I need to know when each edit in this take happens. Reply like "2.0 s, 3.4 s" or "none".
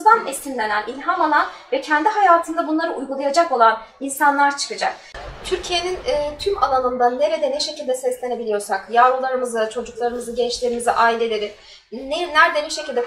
5.1 s

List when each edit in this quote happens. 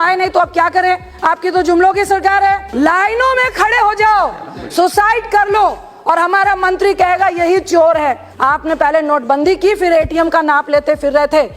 2.7 s, 8.3 s

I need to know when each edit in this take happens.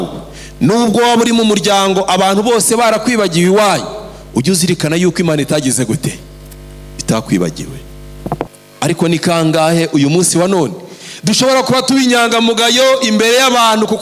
8.6 s

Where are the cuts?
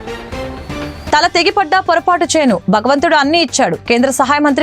1.1 s

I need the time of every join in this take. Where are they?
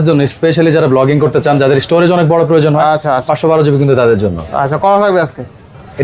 none

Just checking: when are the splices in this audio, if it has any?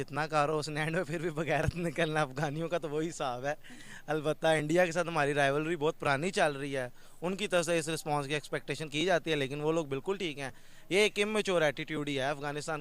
none

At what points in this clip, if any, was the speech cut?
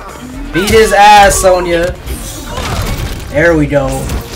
none

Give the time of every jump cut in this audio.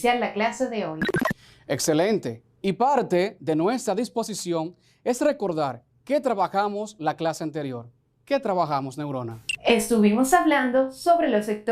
1.9 s

